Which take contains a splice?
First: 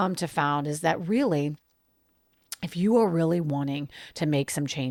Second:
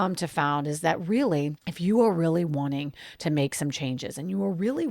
second; 1 cut; at 1.6 s

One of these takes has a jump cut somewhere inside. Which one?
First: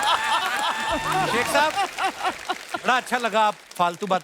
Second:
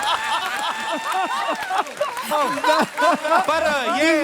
first; 1 cut; at 1.4 s

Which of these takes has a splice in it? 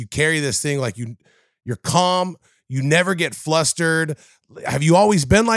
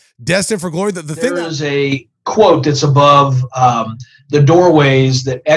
second; 1 cut; at 1.4 s

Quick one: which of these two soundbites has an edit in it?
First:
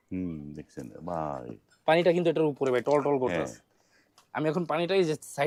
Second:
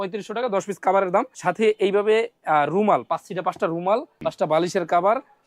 second; 2 cuts; at 1.3 s, 4.1 s

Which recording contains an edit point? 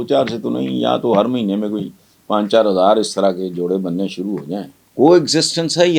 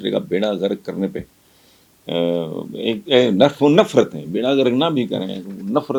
first; 1 cut; at 4.8 s

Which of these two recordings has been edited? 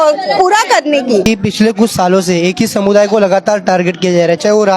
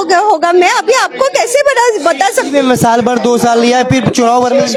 first; 1 cut; at 1.2 s

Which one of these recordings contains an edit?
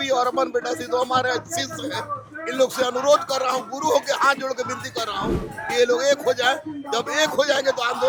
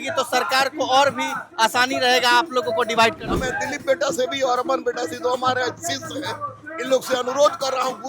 second; 1 cut; at 3.4 s

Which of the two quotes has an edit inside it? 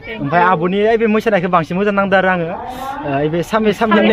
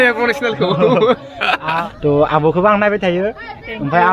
second; 1 cut; at 1.9 s

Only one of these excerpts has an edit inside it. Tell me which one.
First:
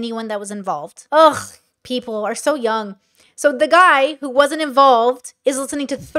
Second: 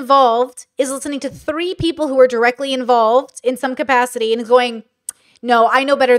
first; 1 cut; at 0.9 s

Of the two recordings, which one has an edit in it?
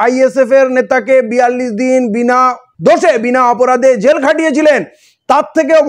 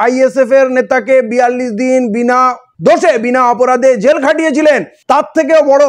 second; 1 cut; at 4.9 s

